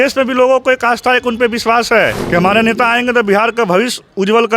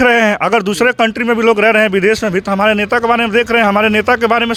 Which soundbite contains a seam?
first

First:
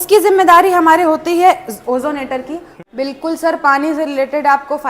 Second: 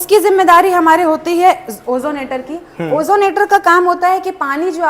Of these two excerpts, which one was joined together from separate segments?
first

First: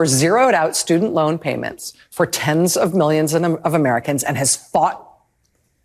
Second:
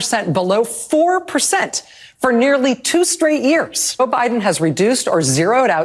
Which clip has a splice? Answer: second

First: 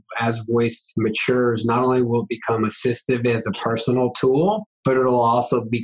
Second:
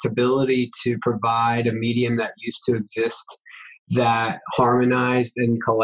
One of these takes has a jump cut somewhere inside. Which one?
first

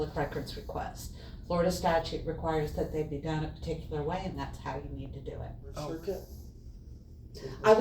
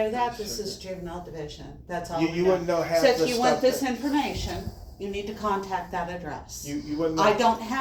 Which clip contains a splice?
first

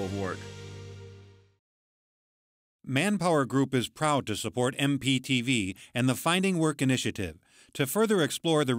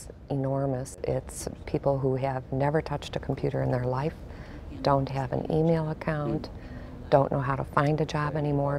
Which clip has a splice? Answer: second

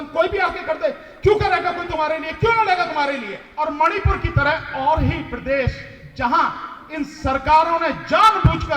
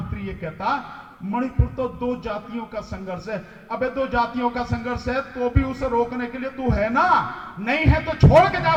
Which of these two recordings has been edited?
first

